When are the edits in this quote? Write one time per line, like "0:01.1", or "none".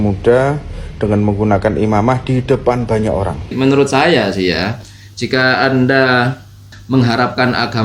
0:03.5
0:06.7